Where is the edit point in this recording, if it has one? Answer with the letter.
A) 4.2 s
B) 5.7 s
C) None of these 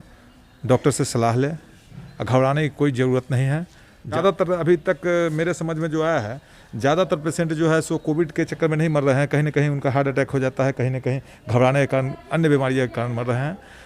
A